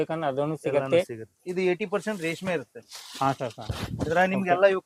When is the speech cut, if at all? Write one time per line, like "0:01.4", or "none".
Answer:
0:01.4